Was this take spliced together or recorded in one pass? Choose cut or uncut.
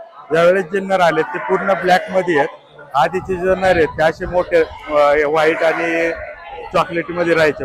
uncut